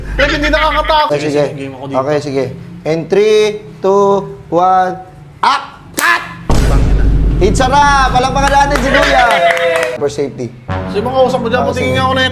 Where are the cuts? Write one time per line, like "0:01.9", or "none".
0:01.1
0:10.0